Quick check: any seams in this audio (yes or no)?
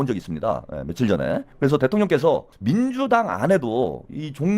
yes